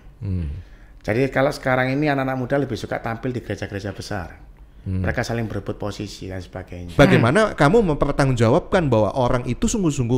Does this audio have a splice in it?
yes; 1 cut; at 6.9 s

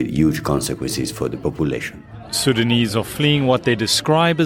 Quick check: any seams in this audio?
yes; 1 cut; at 2.0 s

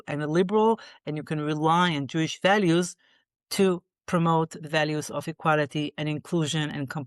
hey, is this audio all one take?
yes; 0 cuts

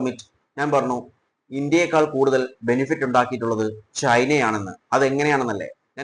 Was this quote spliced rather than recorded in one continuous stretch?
no; 0 cuts

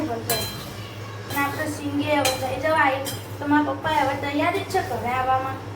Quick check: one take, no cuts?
no; 1 cut; at 1.2 s

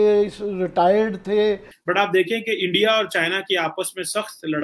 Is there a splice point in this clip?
yes; 1 cut; at 1.7 s

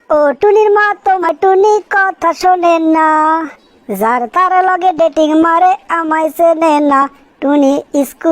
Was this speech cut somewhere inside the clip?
yes; 1 cut; at 1.3 s

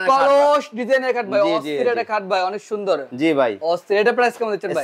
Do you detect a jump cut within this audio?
no; 0 cuts

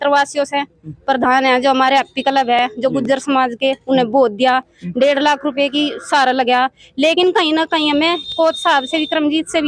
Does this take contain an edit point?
no; 0 cuts

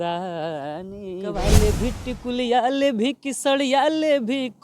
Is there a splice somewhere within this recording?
yes; 1 cut; at 1.4 s

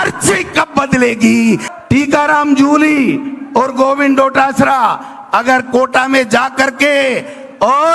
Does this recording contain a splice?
yes; 1 cut; at 1.7 s

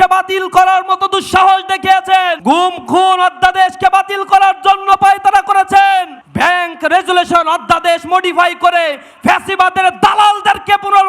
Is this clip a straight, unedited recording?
no; 2 cuts; at 2.4 s, 6.2 s

